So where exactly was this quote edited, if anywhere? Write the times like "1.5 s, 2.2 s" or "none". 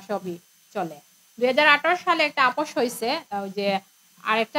none